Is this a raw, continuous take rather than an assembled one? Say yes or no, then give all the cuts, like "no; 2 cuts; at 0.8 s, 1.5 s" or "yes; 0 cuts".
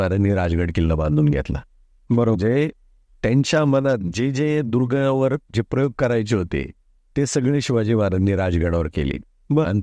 yes; 0 cuts